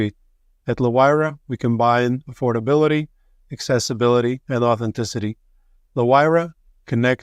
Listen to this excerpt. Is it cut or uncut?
uncut